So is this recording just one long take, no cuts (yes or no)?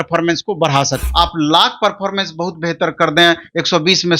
no